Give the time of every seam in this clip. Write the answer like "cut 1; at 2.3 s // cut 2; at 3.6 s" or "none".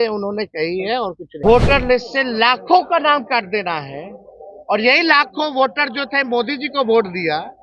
cut 1; at 1.4 s